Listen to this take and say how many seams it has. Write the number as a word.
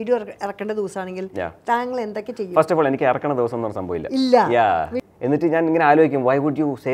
one